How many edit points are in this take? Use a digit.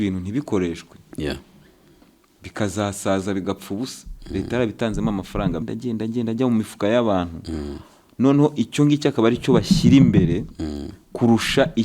1